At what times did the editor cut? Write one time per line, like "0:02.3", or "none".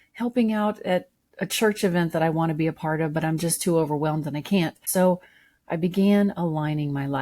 0:04.8